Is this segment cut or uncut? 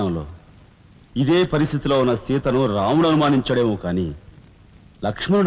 uncut